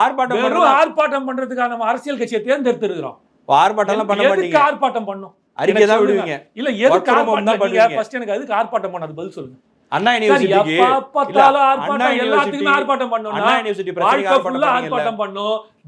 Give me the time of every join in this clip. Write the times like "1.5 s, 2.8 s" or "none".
none